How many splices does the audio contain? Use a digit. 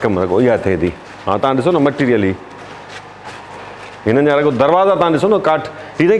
0